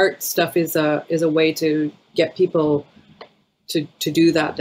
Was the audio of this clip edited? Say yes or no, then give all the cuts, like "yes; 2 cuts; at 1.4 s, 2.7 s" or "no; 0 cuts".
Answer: no; 0 cuts